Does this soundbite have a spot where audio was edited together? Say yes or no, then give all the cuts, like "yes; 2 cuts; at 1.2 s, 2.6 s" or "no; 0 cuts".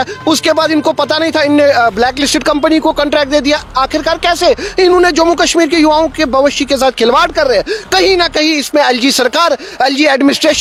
no; 0 cuts